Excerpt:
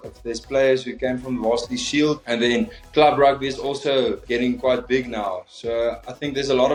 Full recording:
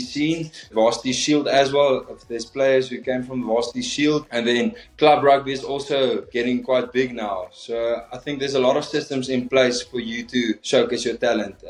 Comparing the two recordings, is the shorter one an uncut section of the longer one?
yes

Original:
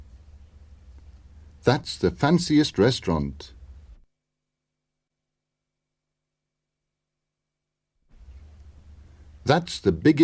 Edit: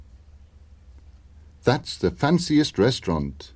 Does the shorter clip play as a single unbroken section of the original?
yes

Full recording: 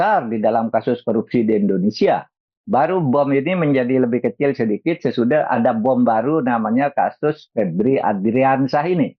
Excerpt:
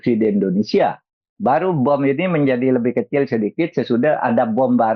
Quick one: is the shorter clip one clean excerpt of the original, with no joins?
yes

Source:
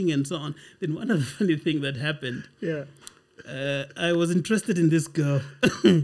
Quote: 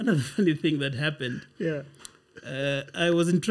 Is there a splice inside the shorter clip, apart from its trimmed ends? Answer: no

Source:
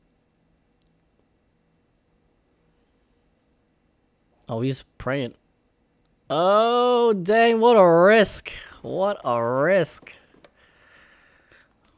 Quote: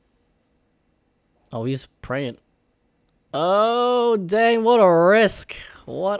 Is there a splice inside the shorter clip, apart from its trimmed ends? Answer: no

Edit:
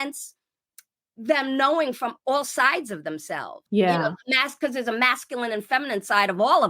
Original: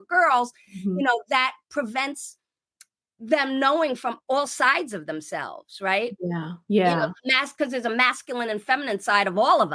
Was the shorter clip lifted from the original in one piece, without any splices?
no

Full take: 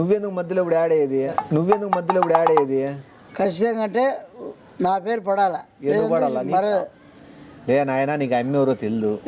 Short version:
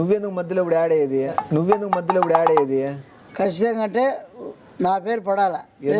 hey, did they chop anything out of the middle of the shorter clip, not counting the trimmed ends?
no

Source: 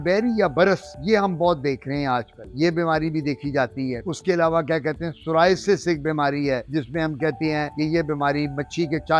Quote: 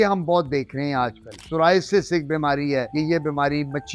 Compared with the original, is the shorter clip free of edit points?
no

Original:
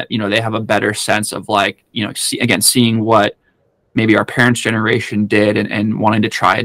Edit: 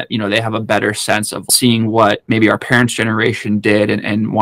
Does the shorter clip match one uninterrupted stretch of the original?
no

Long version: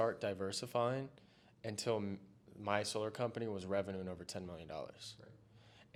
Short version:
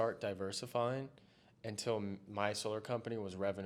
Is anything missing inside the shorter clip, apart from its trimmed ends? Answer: yes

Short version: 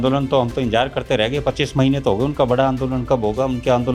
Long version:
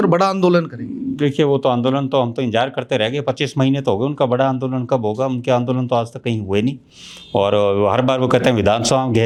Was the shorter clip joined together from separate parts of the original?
no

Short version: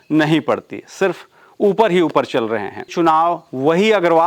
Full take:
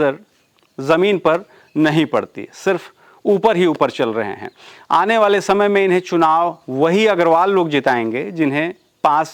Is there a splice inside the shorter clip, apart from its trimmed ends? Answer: yes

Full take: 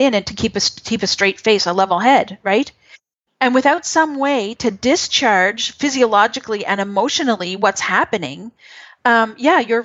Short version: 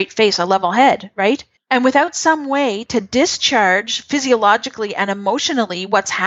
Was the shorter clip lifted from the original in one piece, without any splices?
no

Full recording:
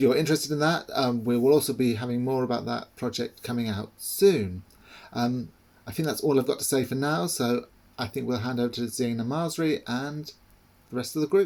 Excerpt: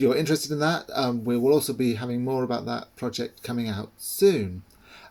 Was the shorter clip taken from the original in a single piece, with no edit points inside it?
yes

